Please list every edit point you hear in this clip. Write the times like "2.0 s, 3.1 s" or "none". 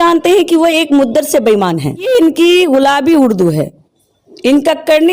1.9 s

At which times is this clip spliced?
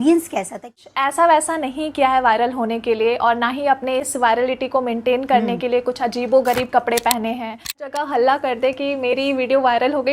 0.8 s, 7.8 s

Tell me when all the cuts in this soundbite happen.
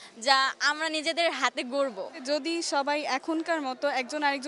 2.2 s

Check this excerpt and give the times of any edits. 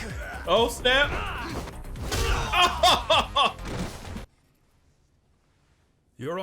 4.4 s

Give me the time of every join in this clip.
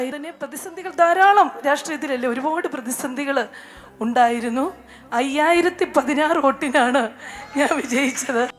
none

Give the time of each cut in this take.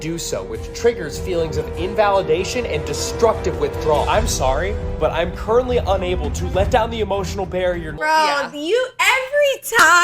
8.0 s

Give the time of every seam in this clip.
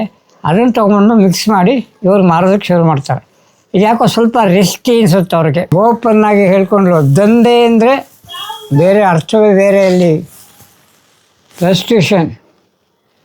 5.7 s

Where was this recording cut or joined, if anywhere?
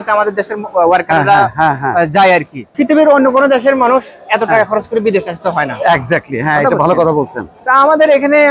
none

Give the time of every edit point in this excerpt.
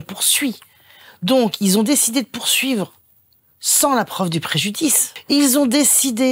5.1 s

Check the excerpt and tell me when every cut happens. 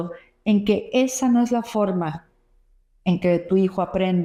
none

